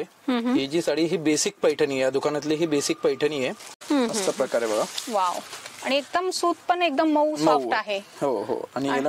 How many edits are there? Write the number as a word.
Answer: one